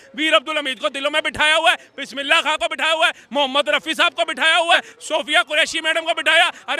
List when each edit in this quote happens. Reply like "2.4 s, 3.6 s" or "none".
4.9 s